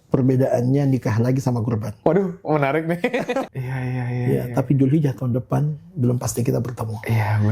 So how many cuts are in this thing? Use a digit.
1